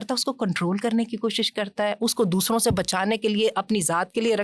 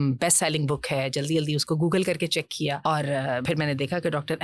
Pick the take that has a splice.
second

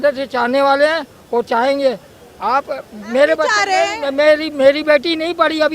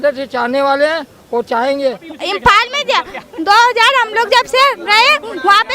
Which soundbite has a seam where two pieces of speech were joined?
second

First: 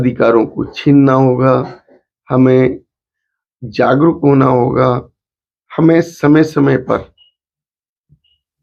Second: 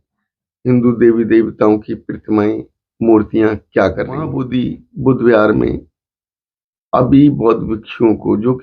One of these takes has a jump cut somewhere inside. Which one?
second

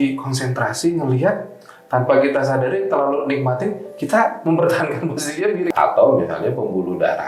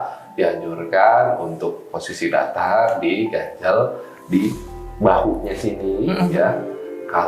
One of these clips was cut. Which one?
first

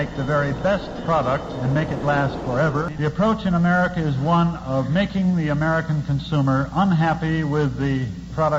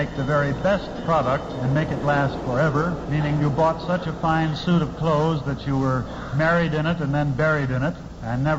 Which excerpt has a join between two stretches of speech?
first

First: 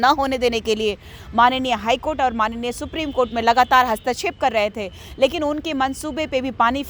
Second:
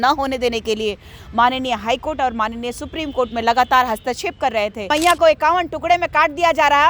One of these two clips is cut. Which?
second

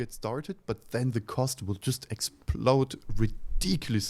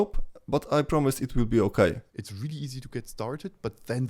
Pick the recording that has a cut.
second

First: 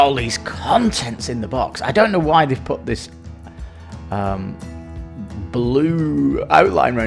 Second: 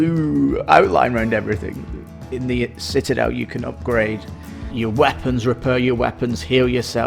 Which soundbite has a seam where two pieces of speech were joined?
second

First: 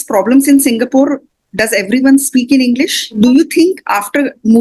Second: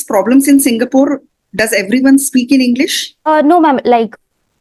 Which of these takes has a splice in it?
first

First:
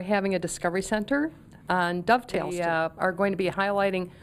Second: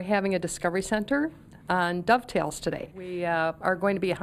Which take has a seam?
first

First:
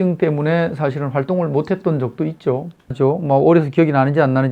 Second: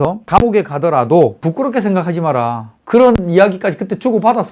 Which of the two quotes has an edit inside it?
first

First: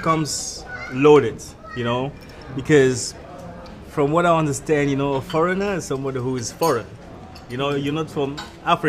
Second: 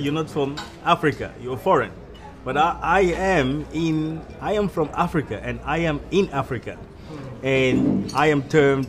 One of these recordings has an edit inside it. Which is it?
first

